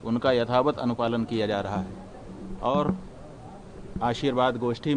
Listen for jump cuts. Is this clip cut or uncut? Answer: uncut